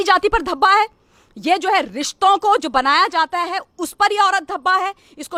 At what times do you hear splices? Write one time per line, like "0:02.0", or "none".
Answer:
none